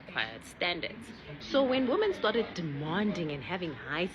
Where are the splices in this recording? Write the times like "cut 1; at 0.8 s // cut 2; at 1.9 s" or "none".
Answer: cut 1; at 1.3 s